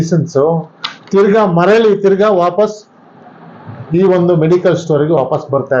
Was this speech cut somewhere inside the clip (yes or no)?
no